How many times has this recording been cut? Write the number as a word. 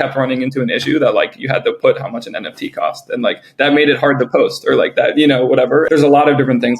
one